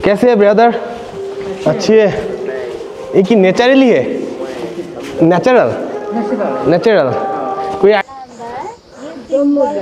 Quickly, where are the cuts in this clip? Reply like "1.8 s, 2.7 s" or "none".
8.0 s